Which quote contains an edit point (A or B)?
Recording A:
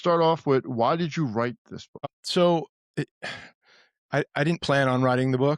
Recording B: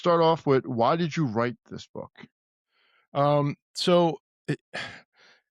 A